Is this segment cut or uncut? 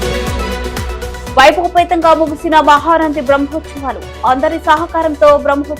cut